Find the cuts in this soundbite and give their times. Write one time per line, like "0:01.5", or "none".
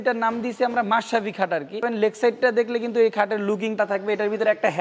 0:01.9
0:03.8